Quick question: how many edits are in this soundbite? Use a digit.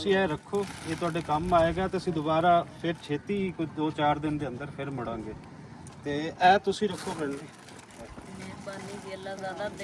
0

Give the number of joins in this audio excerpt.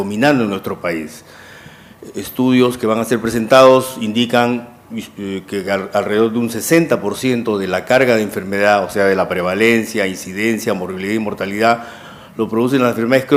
0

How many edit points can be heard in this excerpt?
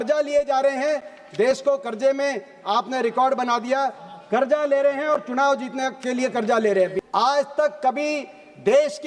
2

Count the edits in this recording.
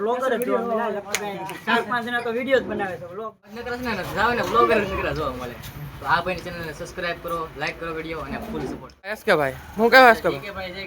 2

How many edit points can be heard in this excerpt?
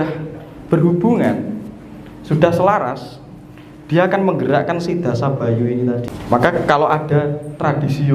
1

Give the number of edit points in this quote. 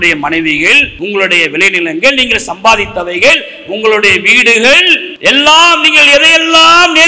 2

